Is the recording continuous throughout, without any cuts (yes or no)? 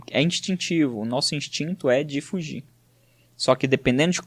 yes